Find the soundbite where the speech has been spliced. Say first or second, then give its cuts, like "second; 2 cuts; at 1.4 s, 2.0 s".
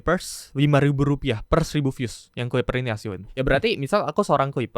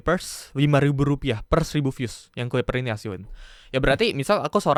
first; 1 cut; at 3.2 s